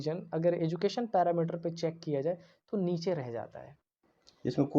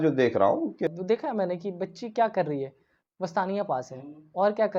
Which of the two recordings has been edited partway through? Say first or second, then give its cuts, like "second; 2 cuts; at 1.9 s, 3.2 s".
second; 1 cut; at 0.9 s